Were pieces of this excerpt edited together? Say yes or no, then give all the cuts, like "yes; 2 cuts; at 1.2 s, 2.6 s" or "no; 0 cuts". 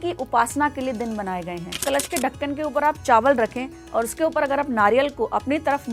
yes; 1 cut; at 1.8 s